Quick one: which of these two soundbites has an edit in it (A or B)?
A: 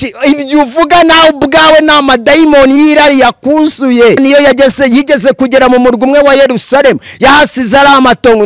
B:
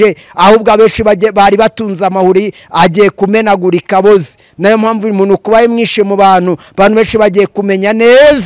A